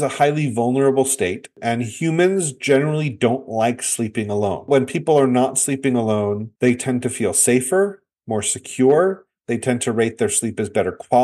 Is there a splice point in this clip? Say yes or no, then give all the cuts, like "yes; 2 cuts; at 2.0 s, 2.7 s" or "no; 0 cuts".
yes; 1 cut; at 4.7 s